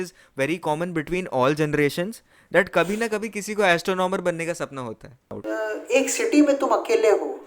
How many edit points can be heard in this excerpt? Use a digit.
1